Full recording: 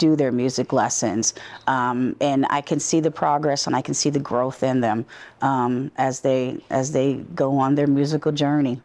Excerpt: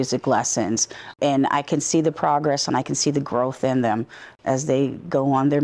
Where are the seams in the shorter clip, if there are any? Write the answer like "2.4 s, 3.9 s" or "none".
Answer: 1.1 s, 4.3 s